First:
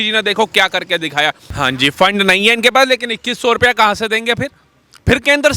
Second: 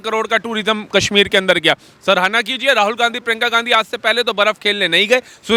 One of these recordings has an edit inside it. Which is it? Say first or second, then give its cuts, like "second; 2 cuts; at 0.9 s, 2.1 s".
first; 1 cut; at 1.5 s